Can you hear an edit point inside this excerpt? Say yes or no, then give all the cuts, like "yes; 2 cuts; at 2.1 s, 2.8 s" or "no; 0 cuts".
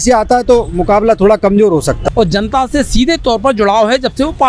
yes; 1 cut; at 2.0 s